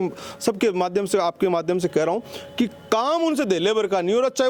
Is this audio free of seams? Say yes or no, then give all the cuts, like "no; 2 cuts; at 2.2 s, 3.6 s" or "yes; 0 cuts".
yes; 0 cuts